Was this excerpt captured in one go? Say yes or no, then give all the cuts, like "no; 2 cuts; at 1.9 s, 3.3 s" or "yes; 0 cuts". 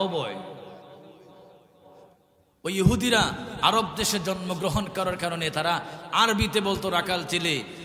yes; 0 cuts